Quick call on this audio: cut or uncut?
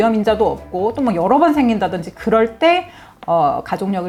uncut